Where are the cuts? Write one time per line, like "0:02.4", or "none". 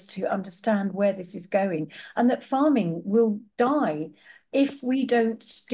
none